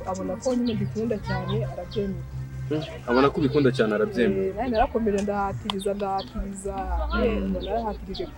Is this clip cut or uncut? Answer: uncut